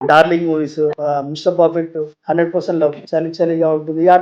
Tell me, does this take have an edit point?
yes; 3 cuts; at 0.9 s, 2.1 s, 3.0 s

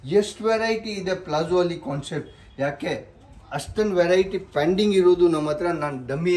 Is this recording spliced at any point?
no; 0 cuts

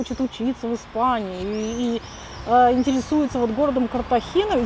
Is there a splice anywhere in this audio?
no; 0 cuts

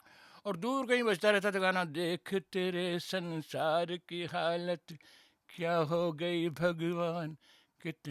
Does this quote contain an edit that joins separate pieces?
no; 0 cuts

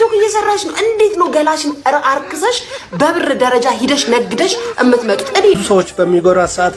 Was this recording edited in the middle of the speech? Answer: no; 0 cuts

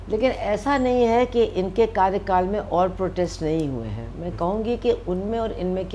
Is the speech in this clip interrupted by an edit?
no; 0 cuts

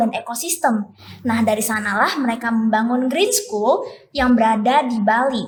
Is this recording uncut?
yes; 0 cuts

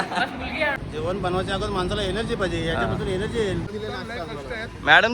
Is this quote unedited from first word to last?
no; 2 cuts; at 0.8 s, 3.7 s

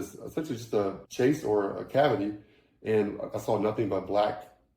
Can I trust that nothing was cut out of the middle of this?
no; 1 cut; at 1.0 s

